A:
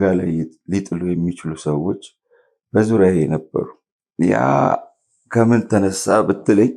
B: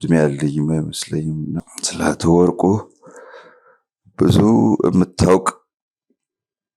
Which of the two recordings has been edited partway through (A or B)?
B